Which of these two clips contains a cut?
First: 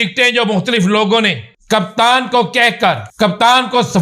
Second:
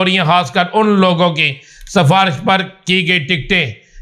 first; 2 cuts; at 1.5 s, 3.1 s

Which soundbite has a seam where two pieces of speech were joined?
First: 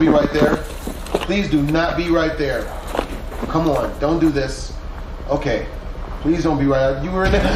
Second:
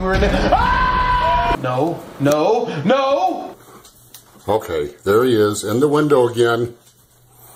second; 1 cut; at 1.5 s

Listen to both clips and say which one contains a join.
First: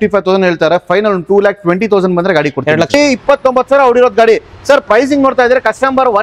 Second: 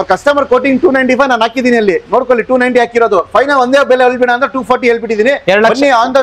first; 1 cut; at 2.9 s

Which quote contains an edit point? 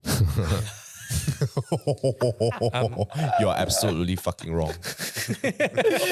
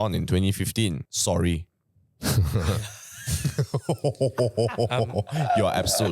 second; 1 cut; at 1.1 s

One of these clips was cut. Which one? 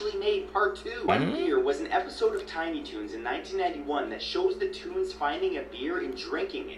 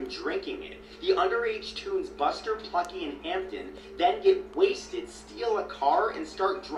first; 1 cut; at 1.1 s

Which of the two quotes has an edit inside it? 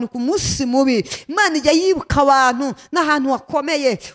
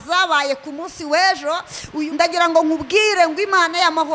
second; 1 cut; at 2.1 s

